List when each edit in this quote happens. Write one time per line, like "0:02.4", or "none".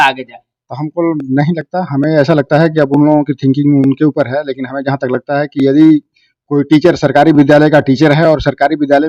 none